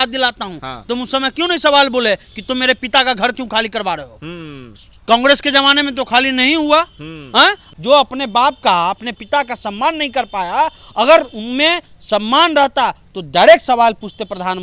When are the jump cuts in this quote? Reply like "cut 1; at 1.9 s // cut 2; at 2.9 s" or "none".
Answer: cut 1; at 7.7 s